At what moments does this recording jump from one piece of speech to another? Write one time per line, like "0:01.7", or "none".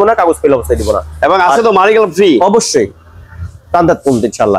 none